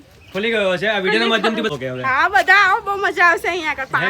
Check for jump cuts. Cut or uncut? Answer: cut